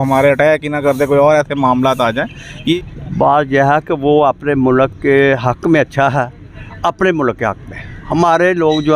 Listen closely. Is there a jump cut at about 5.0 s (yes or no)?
no